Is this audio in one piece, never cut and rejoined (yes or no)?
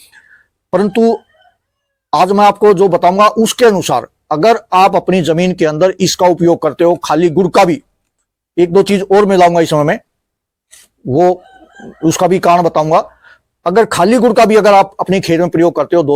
yes